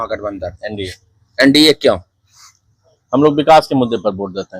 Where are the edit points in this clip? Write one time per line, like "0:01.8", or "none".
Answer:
none